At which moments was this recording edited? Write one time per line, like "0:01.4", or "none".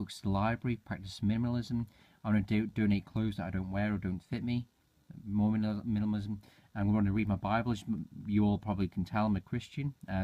0:03.8